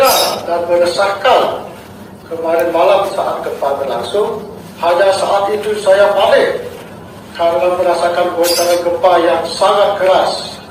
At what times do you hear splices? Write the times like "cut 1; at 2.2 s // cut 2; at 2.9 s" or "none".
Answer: cut 1; at 4.6 s